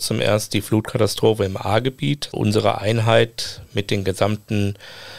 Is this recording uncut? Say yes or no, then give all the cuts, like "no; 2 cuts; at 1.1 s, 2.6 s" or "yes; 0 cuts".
no; 1 cut; at 2.3 s